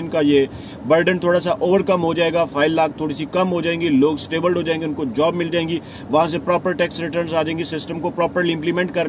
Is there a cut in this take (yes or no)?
no